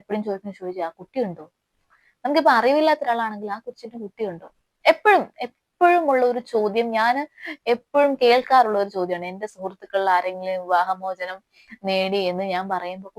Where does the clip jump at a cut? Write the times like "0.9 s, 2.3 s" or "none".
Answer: none